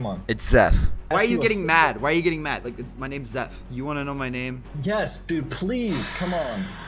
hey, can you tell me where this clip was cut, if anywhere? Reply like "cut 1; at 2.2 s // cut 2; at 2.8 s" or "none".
cut 1; at 1.1 s // cut 2; at 3.6 s